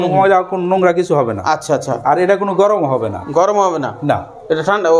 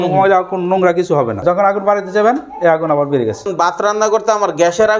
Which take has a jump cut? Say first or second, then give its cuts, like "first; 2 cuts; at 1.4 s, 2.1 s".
second; 2 cuts; at 1.4 s, 3.5 s